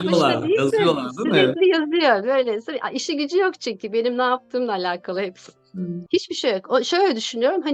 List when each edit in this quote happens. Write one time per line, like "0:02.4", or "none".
0:06.0